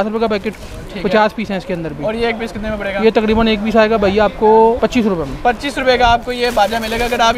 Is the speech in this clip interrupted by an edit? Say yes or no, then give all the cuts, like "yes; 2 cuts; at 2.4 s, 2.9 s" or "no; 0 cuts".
yes; 1 cut; at 4.8 s